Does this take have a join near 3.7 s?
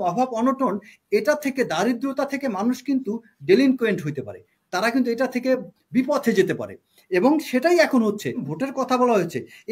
no; 1 cut; at 8.5 s

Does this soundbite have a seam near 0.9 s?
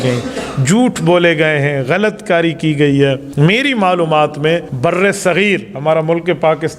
no; 2 cuts; at 3.3 s, 4.7 s

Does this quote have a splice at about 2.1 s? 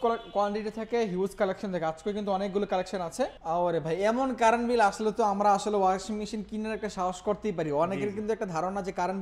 no; 1 cut; at 3.4 s

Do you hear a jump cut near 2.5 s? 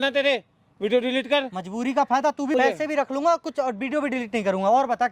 yes; 1 cut; at 2.5 s

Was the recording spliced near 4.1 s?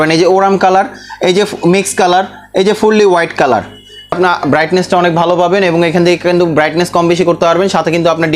yes; 1 cut; at 4.1 s

